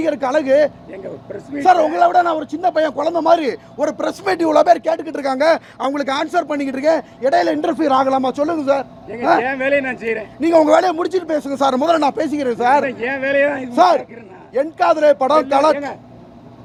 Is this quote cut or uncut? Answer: uncut